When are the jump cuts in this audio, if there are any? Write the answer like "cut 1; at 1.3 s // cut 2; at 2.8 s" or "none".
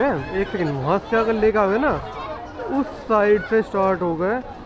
none